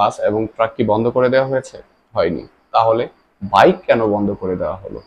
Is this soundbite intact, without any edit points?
yes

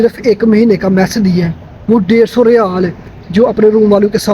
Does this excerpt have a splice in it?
no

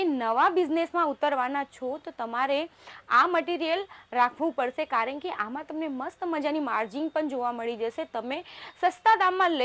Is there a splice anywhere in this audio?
no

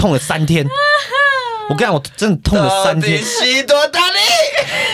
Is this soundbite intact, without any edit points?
yes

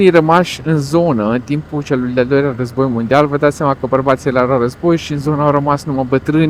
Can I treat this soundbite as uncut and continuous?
yes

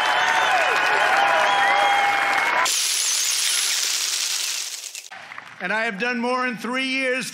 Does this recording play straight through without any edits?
yes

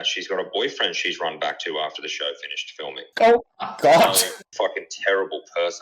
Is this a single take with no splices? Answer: no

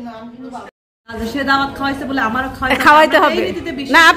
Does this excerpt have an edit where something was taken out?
yes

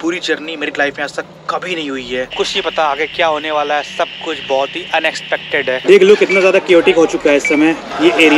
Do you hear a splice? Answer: yes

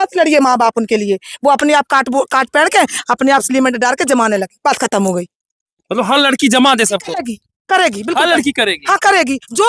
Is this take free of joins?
yes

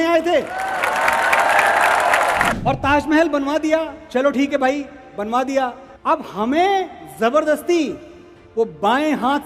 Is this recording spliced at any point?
yes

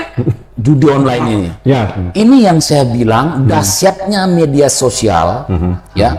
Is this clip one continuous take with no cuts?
yes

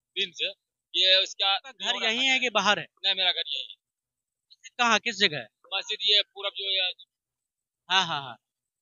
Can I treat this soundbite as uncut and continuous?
no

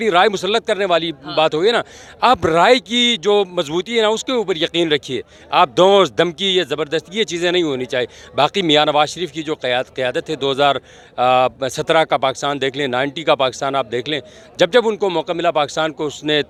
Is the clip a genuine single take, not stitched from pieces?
yes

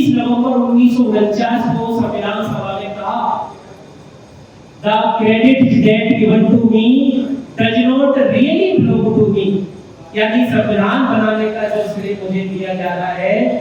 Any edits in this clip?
no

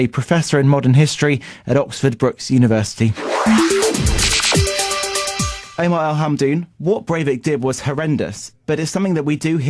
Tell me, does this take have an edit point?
yes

